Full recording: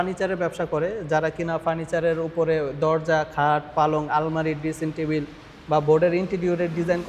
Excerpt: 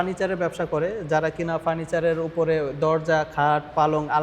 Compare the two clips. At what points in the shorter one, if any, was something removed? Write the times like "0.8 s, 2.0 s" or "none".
none